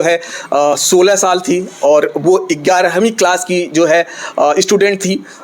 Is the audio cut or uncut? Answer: uncut